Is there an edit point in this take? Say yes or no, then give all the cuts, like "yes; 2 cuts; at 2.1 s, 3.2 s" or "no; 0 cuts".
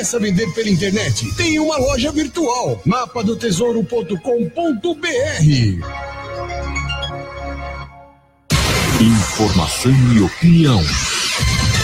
yes; 1 cut; at 8.4 s